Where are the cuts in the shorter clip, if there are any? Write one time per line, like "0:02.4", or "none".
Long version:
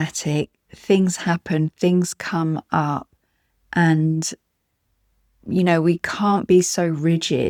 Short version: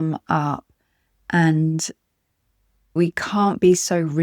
0:03.0